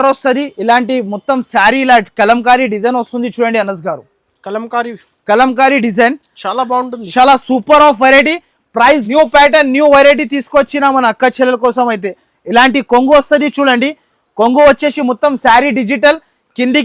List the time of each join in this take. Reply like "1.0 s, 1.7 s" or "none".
9.1 s